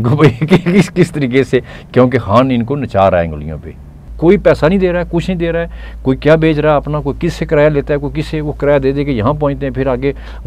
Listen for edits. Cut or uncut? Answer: cut